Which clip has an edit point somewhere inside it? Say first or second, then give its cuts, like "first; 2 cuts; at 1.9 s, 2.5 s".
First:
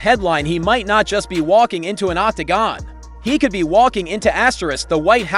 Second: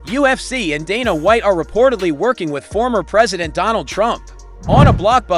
first; 1 cut; at 2.8 s